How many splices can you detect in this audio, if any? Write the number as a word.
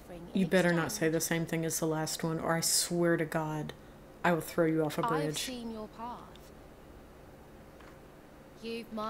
one